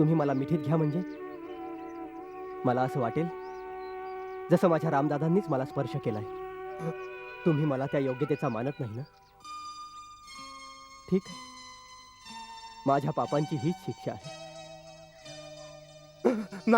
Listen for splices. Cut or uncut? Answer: cut